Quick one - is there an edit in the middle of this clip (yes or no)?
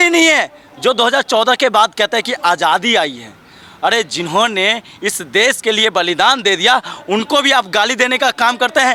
no